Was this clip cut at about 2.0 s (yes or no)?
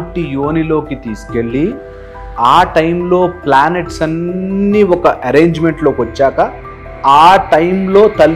no